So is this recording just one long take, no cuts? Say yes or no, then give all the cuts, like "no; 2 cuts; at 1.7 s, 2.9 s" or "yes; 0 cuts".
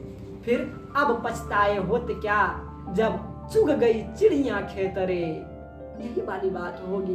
yes; 0 cuts